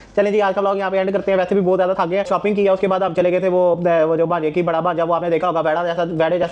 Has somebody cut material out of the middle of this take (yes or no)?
no